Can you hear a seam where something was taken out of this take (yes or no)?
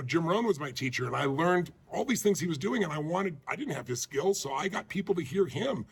no